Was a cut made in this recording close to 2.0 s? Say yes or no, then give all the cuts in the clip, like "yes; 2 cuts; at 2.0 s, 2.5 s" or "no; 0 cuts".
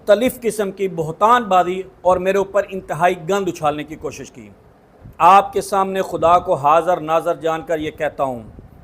no; 1 cut; at 5.0 s